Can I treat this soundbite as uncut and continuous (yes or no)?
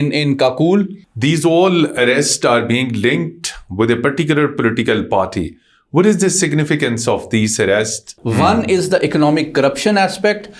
no